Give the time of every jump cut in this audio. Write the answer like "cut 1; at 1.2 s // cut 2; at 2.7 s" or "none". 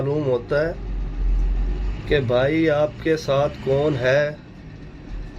none